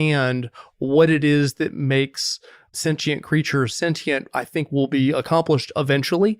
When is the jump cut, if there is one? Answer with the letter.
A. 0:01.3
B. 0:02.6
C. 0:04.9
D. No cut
D